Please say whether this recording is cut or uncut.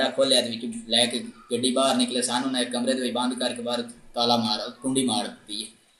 uncut